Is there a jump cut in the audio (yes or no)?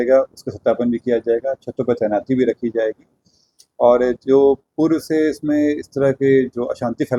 no